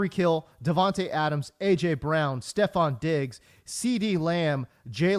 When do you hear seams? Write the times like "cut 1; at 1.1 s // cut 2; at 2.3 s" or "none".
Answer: none